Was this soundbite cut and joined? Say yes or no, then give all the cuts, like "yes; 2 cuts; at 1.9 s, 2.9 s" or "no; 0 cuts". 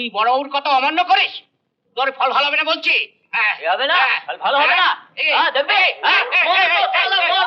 no; 0 cuts